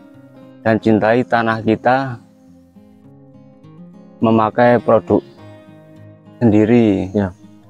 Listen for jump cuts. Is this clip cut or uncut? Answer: uncut